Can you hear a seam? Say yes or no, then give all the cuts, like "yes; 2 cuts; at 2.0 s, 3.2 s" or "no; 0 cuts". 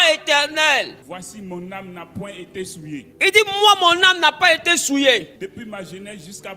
yes; 3 cuts; at 1.0 s, 3.1 s, 5.3 s